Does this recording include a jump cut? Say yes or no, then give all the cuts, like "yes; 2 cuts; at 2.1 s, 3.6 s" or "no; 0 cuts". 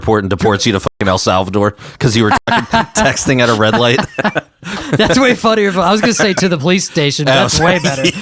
no; 0 cuts